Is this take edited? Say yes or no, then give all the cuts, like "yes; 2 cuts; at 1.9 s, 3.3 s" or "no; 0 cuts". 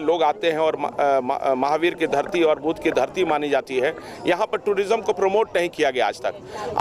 no; 0 cuts